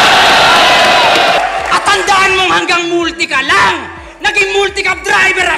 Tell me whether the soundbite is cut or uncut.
cut